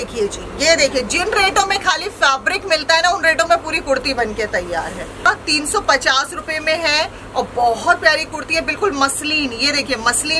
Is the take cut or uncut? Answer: cut